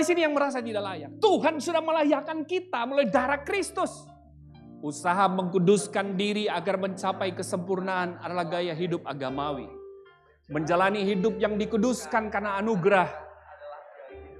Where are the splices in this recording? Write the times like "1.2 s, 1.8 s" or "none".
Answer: none